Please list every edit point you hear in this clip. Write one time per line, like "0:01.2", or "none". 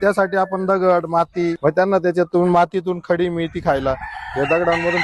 0:01.6